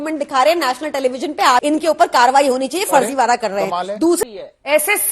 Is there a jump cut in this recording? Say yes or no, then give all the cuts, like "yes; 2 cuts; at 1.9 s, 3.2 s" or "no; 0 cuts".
yes; 2 cuts; at 1.6 s, 4.2 s